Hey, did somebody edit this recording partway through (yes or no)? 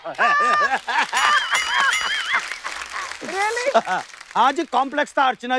no